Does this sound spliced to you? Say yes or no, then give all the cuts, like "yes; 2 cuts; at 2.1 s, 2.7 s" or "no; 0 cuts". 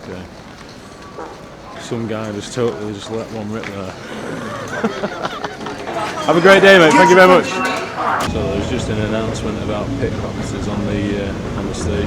yes; 3 cuts; at 1.8 s, 5.9 s, 8.3 s